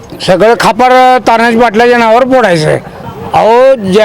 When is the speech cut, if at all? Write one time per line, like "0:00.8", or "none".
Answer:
0:02.9